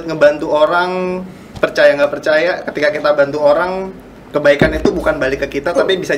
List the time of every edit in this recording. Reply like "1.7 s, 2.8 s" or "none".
none